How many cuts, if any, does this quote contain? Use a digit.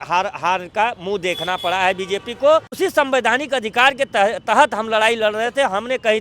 1